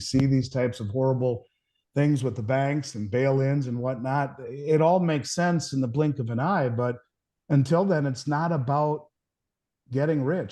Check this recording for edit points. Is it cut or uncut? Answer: uncut